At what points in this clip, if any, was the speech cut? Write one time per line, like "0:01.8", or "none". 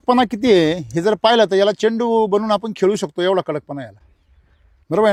none